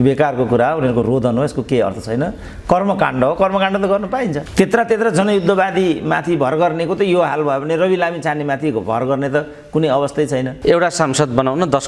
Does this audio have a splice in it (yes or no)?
yes